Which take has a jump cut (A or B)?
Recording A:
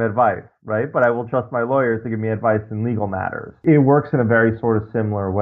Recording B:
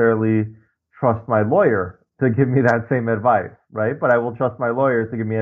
A